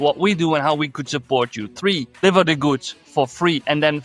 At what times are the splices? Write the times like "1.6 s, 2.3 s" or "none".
2.1 s